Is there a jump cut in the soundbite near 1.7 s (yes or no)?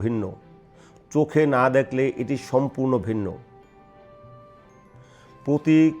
no